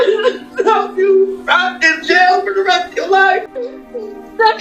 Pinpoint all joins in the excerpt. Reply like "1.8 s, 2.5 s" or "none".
3.7 s